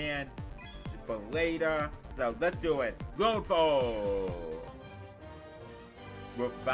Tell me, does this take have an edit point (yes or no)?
yes